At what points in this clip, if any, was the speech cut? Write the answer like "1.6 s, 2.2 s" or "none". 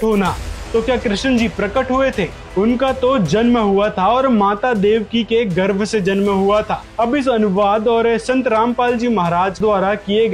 none